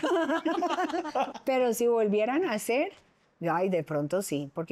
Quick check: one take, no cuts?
no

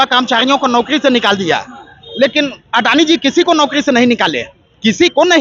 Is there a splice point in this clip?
no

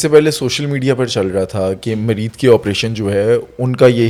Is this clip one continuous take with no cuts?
yes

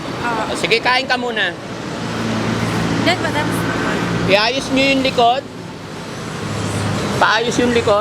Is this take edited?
no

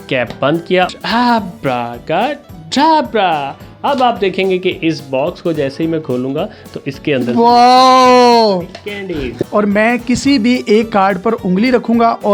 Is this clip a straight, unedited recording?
no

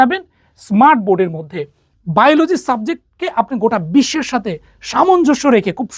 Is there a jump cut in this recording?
yes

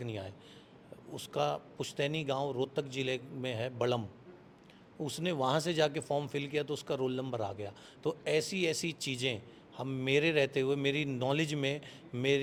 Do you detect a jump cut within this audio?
no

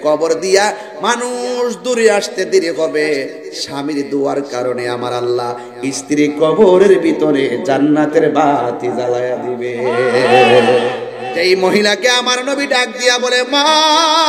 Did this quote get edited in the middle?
yes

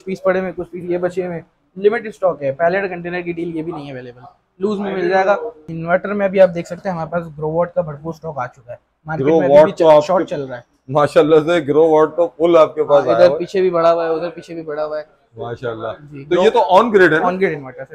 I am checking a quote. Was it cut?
yes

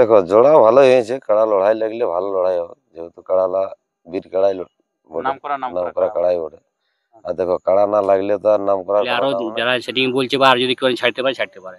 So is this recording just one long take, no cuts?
no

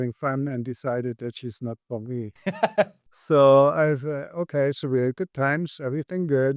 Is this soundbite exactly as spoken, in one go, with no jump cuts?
yes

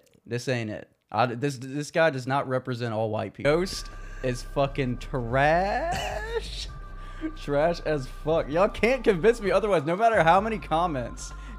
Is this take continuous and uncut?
no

